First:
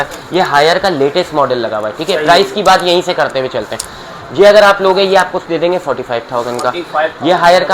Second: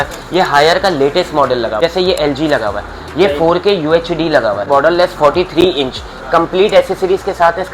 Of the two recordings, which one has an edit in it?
second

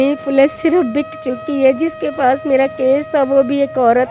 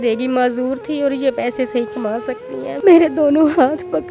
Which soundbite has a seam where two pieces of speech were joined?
second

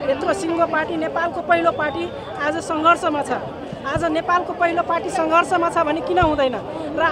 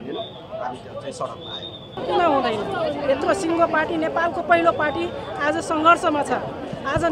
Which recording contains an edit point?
second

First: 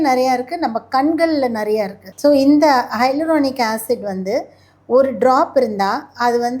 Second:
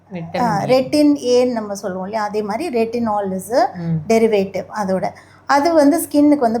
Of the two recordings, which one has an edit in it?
first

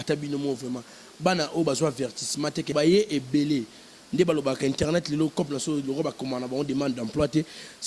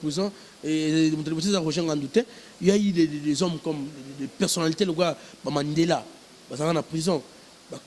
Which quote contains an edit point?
first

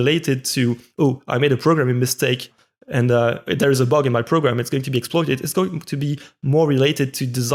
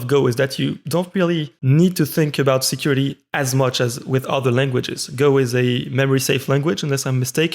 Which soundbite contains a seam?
second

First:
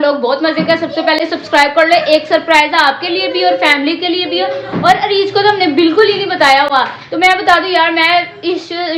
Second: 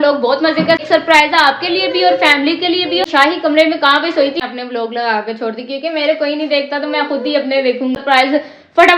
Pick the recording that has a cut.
second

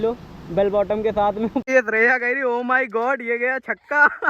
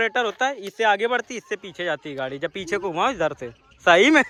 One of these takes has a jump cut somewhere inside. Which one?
first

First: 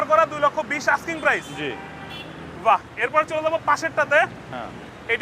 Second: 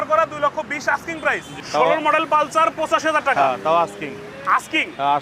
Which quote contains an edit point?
second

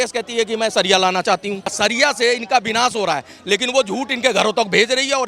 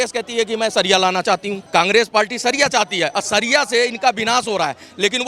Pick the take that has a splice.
first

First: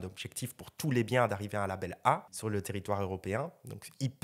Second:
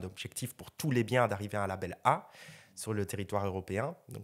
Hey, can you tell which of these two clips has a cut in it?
first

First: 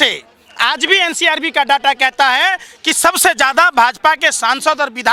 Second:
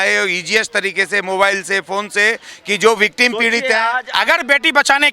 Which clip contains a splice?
second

